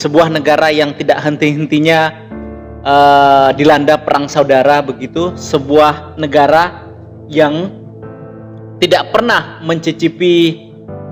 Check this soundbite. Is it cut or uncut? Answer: uncut